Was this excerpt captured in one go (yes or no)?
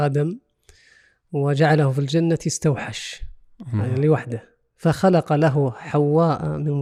yes